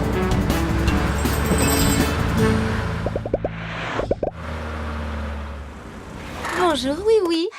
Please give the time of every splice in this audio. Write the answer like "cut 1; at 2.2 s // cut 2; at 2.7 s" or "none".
cut 1; at 1.0 s